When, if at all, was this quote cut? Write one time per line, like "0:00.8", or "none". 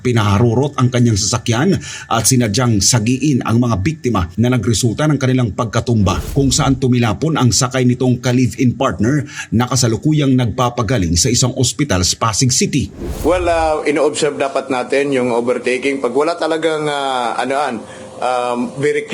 0:06.2
0:13.0